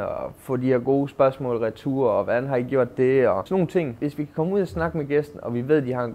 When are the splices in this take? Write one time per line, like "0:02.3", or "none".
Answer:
0:03.9